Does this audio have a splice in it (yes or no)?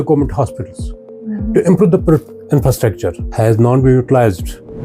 yes